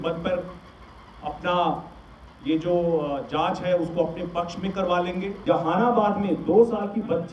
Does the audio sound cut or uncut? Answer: cut